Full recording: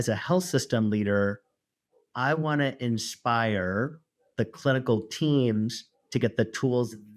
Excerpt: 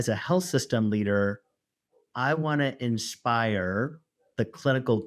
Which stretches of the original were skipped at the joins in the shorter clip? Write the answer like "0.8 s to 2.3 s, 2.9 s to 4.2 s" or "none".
none